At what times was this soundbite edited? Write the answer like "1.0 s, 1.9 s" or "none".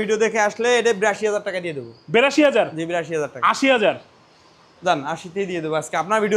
none